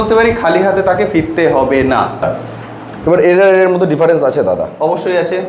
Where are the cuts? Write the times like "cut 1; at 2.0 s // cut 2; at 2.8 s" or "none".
cut 1; at 2.2 s